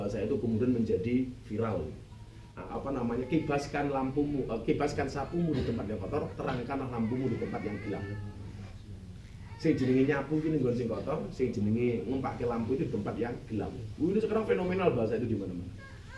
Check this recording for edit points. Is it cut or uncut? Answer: cut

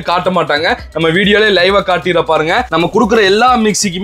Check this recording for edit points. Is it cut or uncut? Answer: uncut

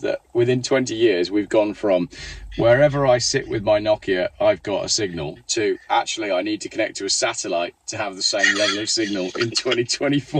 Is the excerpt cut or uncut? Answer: uncut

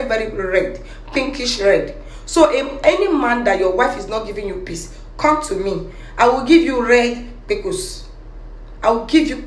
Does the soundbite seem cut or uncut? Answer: uncut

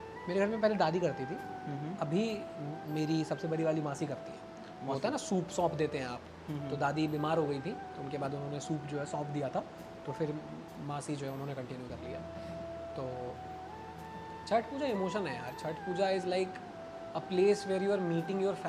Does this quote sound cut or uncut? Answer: uncut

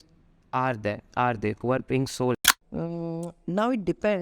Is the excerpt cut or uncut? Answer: cut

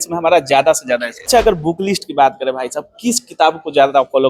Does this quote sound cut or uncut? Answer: cut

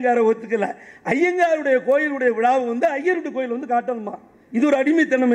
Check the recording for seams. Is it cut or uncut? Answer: uncut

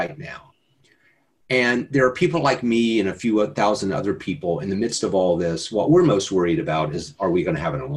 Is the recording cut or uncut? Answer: uncut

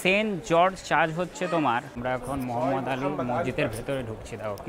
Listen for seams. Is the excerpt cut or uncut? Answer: cut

